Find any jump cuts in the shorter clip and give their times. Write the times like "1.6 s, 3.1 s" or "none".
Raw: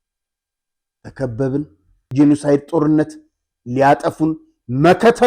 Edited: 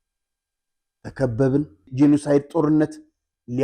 1.8 s

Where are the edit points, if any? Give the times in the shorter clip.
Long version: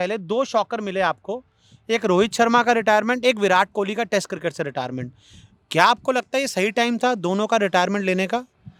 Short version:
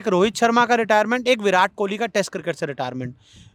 none

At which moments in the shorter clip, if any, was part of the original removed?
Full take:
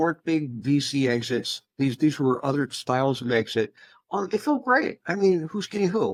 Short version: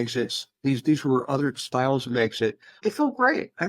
2.8 s

